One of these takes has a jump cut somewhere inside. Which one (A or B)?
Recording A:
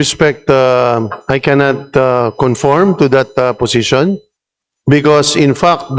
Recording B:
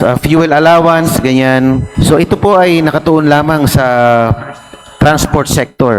B